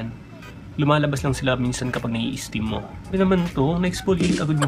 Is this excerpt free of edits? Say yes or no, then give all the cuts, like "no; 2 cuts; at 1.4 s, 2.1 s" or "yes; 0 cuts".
no; 1 cut; at 3.1 s